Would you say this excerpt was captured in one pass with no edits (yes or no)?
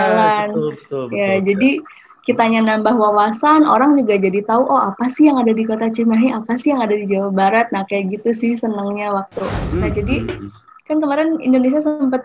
no